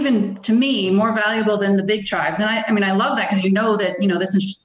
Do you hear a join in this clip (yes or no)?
no